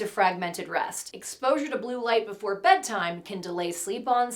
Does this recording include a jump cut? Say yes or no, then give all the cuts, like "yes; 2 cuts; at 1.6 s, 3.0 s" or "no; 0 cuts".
yes; 1 cut; at 1.0 s